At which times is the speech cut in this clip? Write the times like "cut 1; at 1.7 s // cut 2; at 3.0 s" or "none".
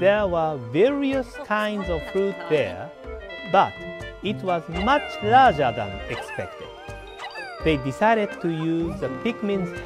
cut 1; at 5.1 s